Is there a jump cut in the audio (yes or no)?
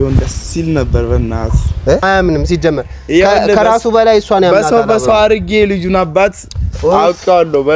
yes